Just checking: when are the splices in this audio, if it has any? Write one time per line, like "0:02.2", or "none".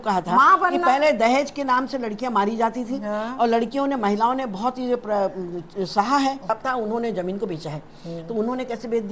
0:06.5